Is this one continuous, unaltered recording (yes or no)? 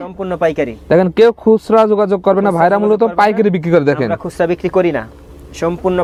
yes